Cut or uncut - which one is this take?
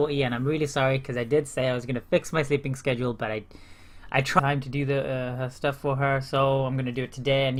uncut